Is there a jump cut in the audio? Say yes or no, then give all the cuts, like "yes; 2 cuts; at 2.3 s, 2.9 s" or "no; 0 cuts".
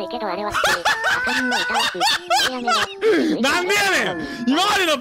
no; 0 cuts